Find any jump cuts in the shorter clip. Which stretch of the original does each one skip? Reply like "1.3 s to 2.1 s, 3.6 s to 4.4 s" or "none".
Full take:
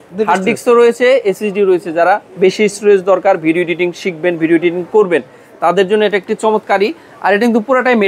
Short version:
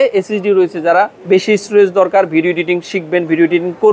none